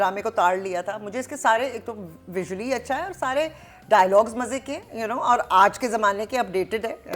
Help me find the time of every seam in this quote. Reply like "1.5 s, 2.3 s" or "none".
none